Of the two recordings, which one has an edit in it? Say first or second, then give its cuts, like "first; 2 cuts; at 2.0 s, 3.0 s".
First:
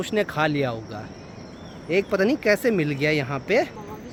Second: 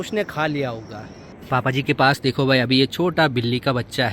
second; 1 cut; at 1.3 s